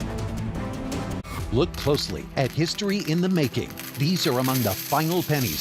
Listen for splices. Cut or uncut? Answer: cut